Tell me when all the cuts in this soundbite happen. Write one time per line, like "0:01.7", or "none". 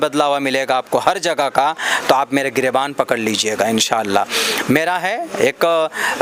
none